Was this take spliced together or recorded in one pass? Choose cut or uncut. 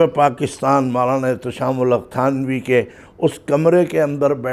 uncut